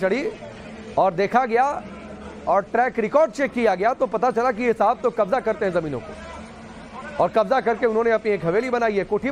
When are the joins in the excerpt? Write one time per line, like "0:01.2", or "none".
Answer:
0:02.6